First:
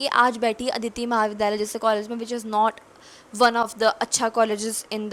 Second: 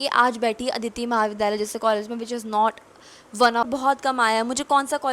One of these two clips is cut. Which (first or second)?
second